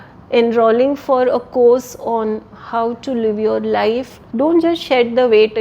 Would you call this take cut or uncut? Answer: cut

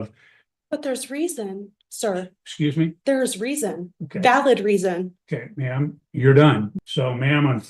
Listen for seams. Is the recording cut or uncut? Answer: cut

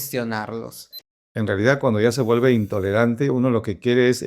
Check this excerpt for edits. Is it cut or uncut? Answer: cut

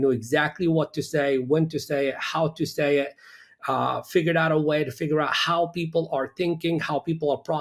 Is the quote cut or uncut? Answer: uncut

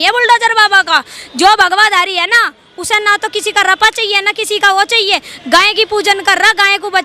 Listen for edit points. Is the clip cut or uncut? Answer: uncut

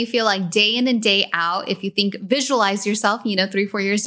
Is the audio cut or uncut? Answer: uncut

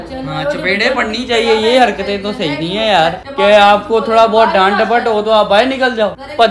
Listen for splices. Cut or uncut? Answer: uncut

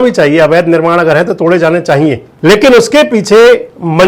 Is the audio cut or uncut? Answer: cut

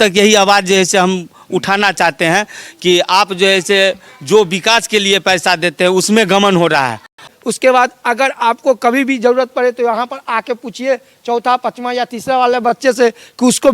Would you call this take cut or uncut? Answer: cut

